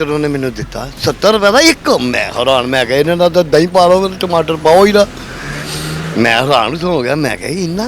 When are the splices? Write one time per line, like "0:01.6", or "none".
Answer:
none